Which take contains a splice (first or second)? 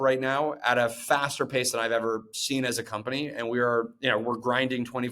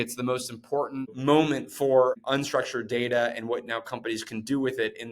second